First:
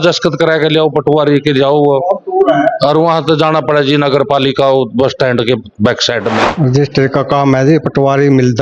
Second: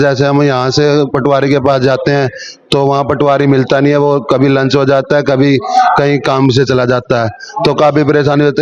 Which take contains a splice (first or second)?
first